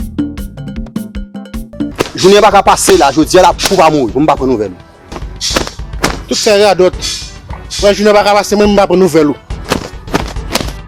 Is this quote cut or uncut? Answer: cut